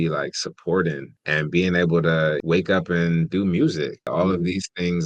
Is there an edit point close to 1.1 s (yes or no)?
yes